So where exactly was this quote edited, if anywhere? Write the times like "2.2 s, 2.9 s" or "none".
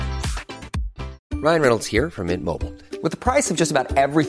1.2 s